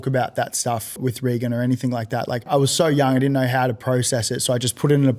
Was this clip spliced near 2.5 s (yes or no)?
yes